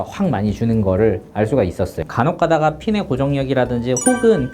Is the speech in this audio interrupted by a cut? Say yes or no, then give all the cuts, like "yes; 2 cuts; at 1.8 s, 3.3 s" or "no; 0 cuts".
yes; 1 cut; at 2.0 s